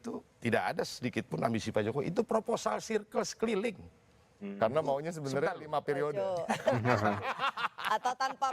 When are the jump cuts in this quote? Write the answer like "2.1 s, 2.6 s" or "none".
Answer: none